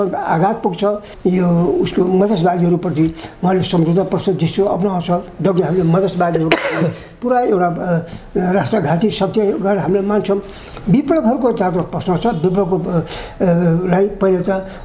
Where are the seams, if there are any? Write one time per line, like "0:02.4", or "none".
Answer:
0:01.1
0:10.6